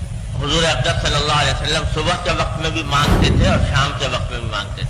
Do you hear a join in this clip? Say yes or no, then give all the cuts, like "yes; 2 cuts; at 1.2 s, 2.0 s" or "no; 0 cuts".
no; 0 cuts